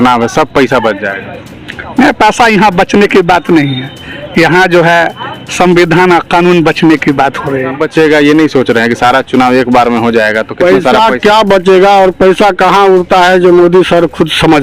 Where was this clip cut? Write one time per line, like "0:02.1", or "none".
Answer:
0:07.8